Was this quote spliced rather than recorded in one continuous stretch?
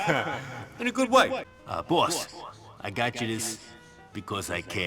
yes; 1 cut; at 1.4 s

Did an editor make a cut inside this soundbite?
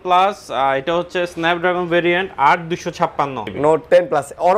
yes; 1 cut; at 3.4 s

